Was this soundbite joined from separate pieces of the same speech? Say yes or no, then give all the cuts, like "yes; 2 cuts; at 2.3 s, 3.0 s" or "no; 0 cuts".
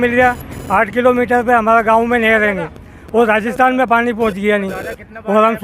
no; 0 cuts